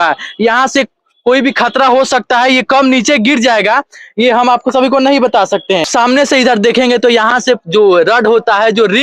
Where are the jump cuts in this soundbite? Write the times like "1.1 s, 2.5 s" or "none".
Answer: 5.9 s

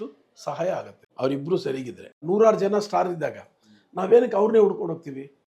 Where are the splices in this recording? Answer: 1.0 s, 2.2 s

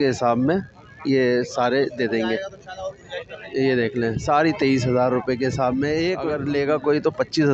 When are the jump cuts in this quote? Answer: 6.4 s

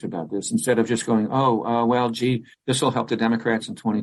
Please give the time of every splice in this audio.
none

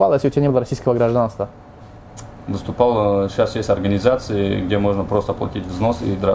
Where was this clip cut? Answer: none

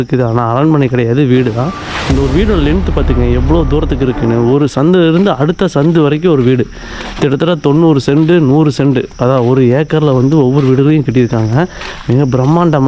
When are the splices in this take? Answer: none

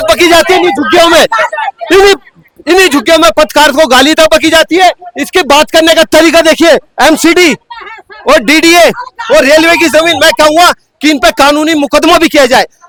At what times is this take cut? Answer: none

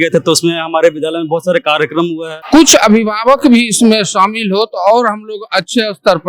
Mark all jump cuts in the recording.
2.3 s

